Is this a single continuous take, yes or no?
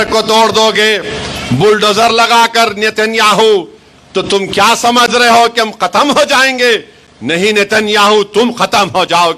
yes